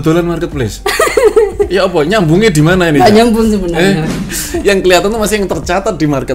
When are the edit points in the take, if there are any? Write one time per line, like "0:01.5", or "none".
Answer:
0:04.3